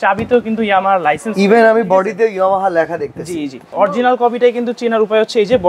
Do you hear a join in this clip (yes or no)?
yes